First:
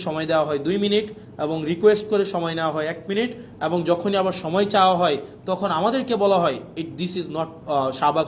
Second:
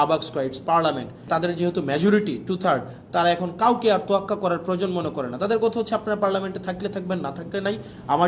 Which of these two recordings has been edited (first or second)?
second